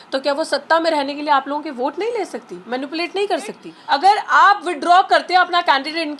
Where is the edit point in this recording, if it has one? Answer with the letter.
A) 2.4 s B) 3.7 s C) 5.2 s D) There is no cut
B